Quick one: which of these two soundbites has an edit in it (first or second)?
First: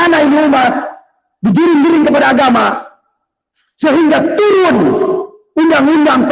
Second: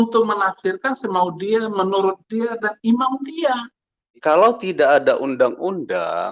second